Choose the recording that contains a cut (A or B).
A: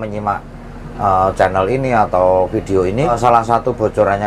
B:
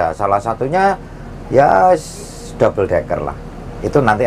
A